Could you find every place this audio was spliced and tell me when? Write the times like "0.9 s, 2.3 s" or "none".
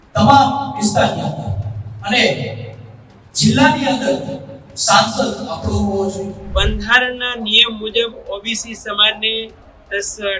6.3 s